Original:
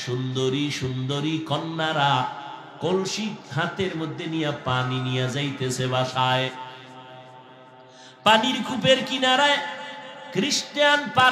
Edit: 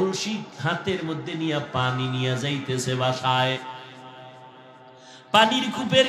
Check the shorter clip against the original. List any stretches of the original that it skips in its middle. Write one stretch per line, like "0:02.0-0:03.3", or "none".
none